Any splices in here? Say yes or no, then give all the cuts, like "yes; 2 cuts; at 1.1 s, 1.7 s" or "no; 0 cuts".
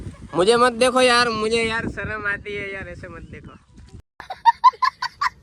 yes; 1 cut; at 3.8 s